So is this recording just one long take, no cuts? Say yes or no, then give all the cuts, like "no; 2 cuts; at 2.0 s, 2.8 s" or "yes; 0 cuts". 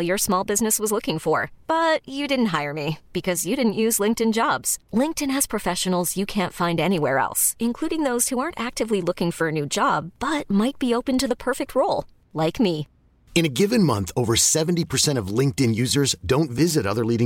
yes; 0 cuts